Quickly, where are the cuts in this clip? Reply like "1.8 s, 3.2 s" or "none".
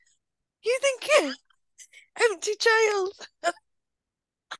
none